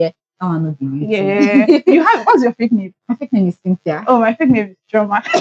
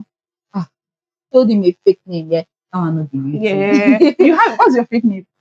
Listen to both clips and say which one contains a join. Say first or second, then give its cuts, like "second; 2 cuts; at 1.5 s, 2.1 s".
second; 1 cut; at 1.3 s